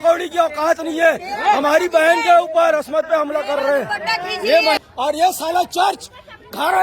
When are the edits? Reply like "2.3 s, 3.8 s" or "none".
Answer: 4.8 s